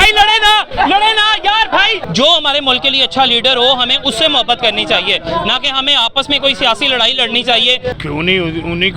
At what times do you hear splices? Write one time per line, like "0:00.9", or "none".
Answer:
0:02.0
0:08.0